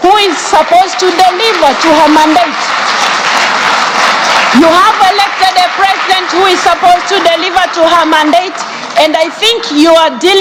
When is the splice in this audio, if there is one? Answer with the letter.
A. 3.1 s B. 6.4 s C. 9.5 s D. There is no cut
D